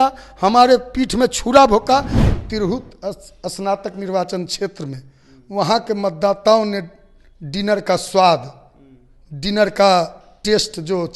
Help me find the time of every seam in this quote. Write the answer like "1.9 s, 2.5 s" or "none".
2.3 s